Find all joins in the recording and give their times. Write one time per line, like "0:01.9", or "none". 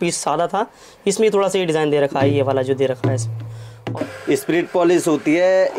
0:03.8